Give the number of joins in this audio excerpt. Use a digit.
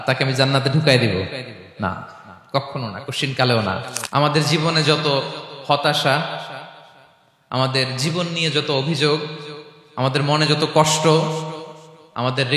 1